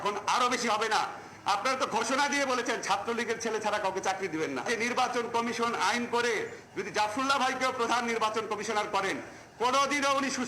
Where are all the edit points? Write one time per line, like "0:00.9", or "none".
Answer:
0:04.7